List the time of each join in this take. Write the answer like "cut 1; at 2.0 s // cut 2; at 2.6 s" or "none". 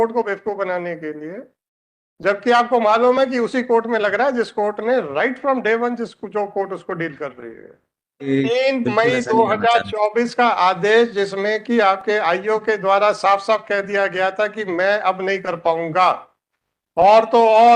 cut 1; at 8.3 s